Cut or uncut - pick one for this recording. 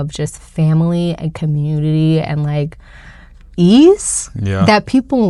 uncut